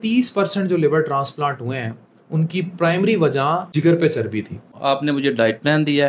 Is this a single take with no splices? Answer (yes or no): no